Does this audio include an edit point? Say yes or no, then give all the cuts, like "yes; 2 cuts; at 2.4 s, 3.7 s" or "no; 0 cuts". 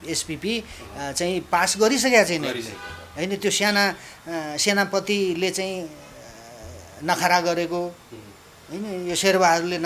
no; 0 cuts